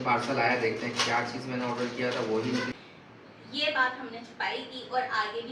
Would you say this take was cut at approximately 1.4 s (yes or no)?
no